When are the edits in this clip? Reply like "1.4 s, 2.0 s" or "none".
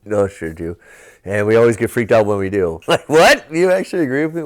2.8 s